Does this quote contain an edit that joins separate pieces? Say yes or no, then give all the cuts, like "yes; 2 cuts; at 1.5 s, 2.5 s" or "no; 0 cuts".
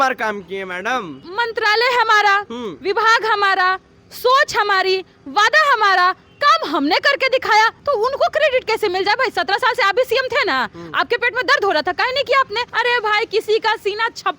yes; 3 cuts; at 1.2 s, 7.8 s, 12.6 s